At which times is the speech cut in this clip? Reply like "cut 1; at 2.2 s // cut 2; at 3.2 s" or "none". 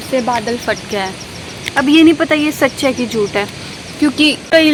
none